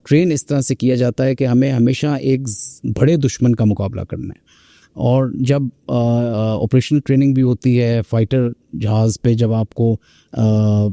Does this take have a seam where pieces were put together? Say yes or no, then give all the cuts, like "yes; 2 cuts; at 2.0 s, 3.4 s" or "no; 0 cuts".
no; 0 cuts